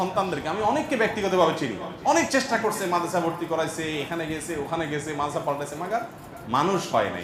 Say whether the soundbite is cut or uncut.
uncut